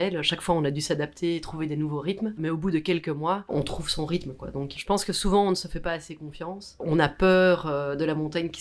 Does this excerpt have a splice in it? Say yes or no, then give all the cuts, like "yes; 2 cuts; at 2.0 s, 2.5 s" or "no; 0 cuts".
no; 0 cuts